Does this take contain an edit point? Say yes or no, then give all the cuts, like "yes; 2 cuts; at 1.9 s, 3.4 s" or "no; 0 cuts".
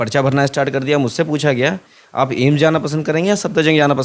no; 0 cuts